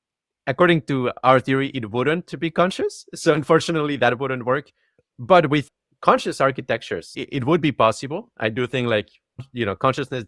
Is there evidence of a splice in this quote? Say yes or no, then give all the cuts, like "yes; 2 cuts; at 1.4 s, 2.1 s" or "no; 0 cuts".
yes; 3 cuts; at 5.6 s, 7.2 s, 9.5 s